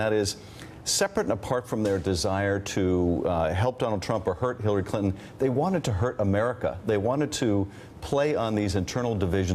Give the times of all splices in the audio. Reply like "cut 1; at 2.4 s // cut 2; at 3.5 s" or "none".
cut 1; at 2.2 s